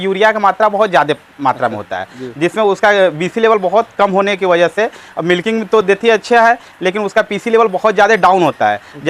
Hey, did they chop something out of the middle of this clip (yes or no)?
no